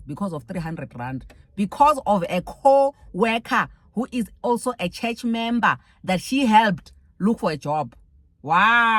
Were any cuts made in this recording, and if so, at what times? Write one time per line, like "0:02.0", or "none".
none